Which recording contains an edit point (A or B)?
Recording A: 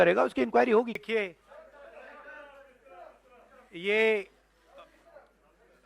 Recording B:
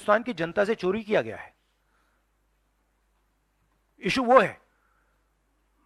A